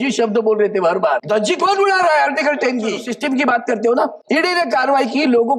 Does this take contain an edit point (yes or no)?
yes